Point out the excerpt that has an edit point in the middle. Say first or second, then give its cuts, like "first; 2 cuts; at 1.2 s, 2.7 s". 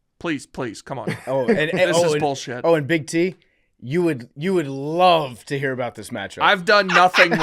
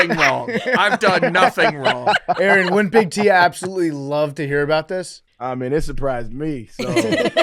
second; 1 cut; at 5.2 s